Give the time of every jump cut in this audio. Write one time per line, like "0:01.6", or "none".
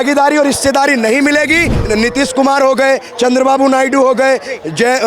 0:01.7